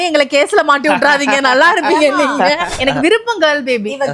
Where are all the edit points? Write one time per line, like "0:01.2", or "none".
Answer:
0:02.7